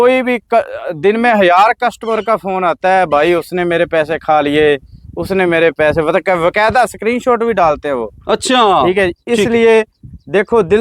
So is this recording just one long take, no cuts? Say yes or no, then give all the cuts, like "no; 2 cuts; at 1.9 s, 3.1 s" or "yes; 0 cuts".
yes; 0 cuts